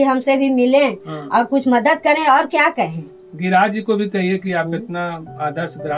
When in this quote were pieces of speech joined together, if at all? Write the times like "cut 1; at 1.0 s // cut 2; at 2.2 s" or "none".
none